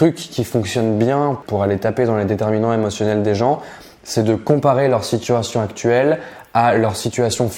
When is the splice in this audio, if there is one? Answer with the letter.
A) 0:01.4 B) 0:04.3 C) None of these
A